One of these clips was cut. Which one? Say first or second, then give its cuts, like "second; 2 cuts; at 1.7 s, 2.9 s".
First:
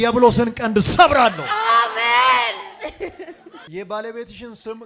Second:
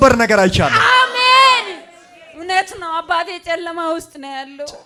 first; 1 cut; at 3.6 s